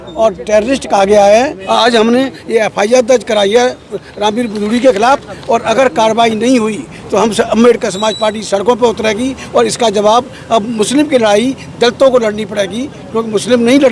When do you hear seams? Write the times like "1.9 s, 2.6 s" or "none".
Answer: 1.6 s

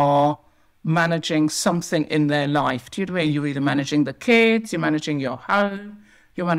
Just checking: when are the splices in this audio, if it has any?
none

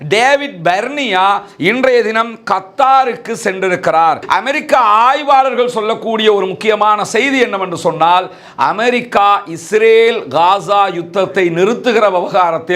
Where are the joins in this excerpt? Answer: 4.2 s

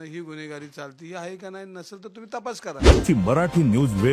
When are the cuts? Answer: 3.0 s

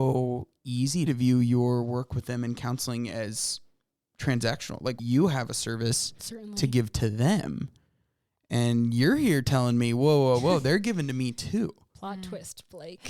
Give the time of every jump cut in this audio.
1.1 s, 5.0 s

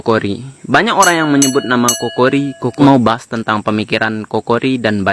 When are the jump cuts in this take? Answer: 2.7 s

